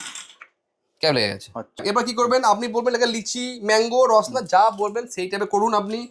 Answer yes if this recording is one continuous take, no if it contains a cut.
no